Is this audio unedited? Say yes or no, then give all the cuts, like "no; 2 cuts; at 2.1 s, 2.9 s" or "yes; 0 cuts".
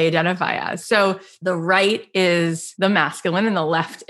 no; 2 cuts; at 1.3 s, 2.6 s